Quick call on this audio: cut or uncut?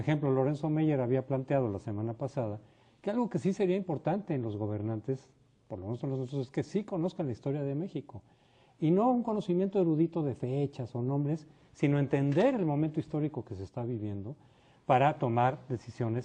uncut